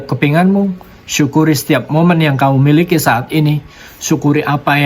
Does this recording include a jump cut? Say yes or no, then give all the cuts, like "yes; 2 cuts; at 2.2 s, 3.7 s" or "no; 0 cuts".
no; 0 cuts